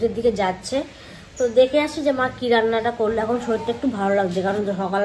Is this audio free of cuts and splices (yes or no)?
yes